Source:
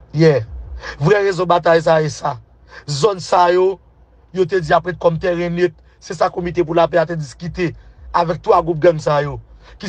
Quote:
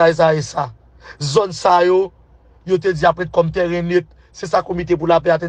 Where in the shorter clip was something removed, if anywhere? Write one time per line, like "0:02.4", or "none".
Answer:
none